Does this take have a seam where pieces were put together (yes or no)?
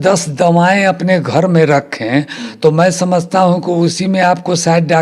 no